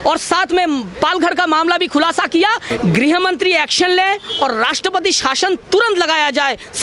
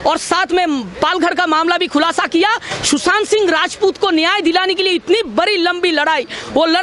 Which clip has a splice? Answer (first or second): first